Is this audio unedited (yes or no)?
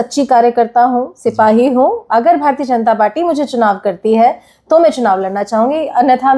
yes